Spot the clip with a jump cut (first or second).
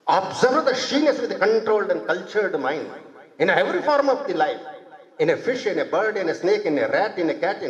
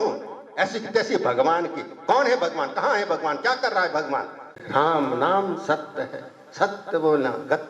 second